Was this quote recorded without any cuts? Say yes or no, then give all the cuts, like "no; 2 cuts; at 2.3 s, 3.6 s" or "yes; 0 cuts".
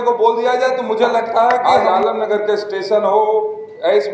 no; 1 cut; at 1.6 s